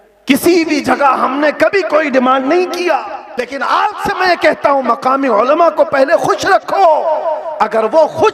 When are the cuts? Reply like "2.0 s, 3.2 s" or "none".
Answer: 3.3 s

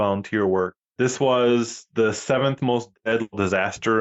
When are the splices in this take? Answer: none

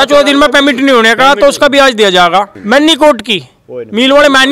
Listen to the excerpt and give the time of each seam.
2.6 s

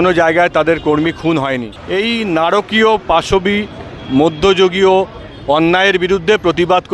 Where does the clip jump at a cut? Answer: 1.7 s

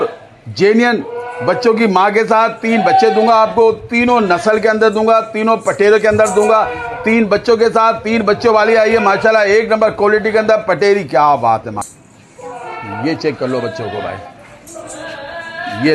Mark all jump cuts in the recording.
11.9 s

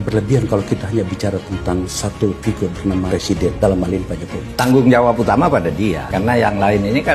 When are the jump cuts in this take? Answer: none

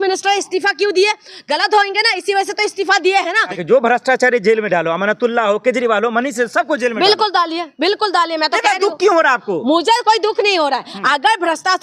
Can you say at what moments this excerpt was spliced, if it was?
3.5 s

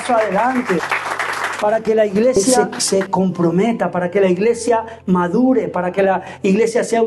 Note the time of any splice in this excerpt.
0.9 s, 2.5 s

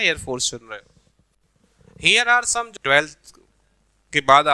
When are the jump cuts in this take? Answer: 2.7 s

